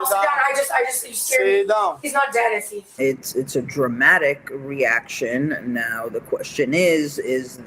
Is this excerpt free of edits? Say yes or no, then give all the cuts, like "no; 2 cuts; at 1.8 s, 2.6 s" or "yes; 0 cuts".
no; 1 cut; at 2.9 s